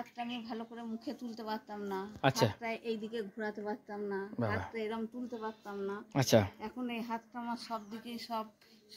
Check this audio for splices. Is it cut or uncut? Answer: uncut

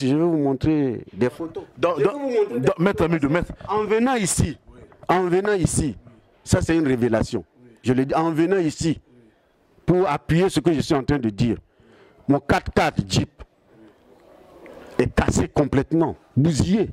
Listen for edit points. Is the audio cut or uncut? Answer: uncut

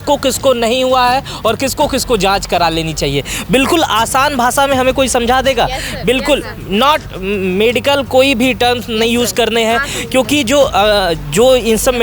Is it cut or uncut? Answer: uncut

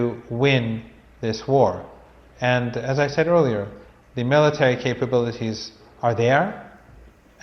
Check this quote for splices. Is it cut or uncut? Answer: cut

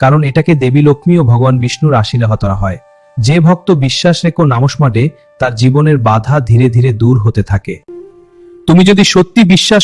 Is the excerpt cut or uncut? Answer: cut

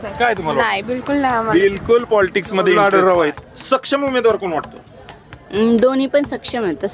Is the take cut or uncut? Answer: cut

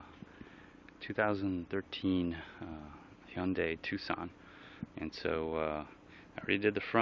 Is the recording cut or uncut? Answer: uncut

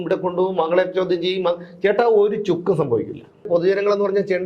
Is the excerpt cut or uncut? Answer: cut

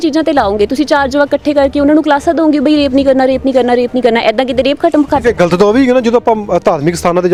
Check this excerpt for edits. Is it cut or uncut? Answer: uncut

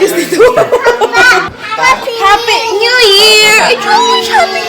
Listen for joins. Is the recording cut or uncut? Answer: cut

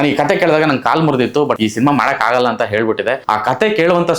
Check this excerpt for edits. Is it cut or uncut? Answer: cut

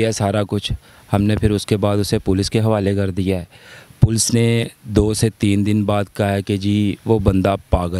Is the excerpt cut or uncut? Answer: uncut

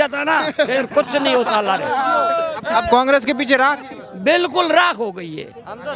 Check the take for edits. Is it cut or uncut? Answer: uncut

